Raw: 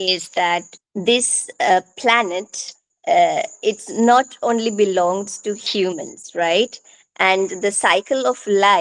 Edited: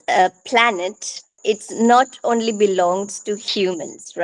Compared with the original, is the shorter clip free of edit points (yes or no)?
no